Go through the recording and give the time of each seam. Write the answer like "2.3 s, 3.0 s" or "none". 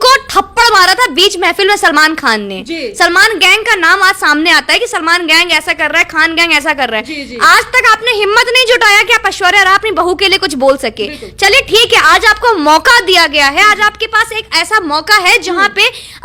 none